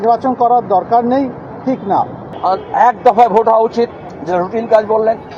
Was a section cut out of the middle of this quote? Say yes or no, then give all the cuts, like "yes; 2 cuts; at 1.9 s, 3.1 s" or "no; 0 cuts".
yes; 2 cuts; at 2.1 s, 4.1 s